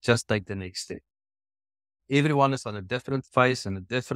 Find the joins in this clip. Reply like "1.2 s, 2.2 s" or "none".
2.0 s